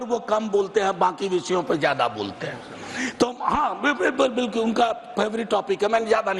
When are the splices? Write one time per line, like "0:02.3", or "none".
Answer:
none

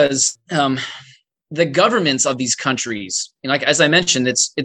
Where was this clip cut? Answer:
none

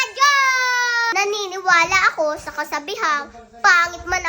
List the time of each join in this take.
0:01.1

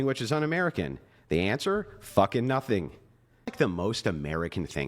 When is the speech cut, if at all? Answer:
0:03.5

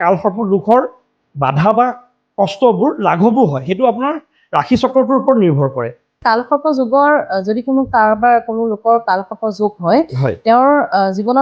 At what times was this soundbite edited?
0:06.2

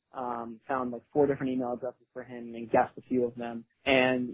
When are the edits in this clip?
none

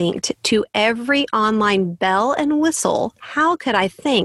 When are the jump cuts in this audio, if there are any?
0:03.2

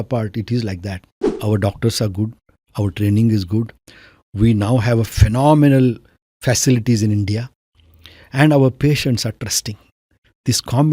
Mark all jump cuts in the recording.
0:01.2

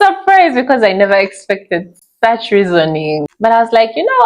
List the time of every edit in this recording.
0:03.3

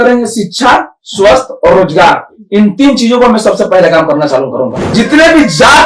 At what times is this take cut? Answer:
0:04.8

